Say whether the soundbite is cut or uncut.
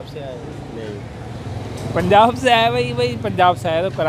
cut